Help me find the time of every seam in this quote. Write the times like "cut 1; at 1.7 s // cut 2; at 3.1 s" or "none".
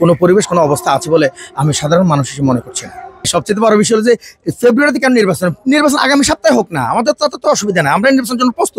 cut 1; at 3.3 s